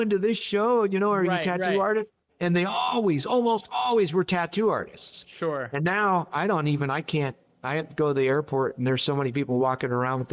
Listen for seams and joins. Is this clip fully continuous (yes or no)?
yes